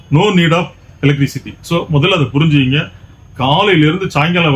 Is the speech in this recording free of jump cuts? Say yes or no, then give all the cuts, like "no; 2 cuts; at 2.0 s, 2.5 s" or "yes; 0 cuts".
yes; 0 cuts